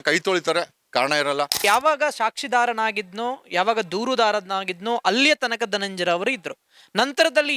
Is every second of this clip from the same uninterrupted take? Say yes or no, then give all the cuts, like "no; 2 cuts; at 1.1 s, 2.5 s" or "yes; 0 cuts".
no; 1 cut; at 1.6 s